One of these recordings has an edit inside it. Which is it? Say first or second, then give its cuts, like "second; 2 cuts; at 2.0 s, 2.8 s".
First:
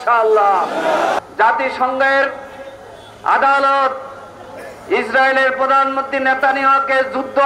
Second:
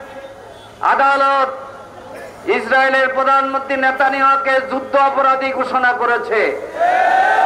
first; 1 cut; at 1.2 s